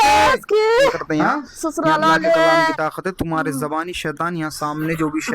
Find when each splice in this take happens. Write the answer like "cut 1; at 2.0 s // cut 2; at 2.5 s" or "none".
cut 1; at 2.7 s